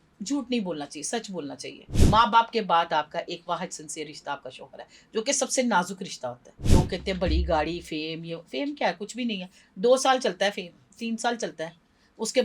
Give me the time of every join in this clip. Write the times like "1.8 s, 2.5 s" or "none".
1.9 s, 6.5 s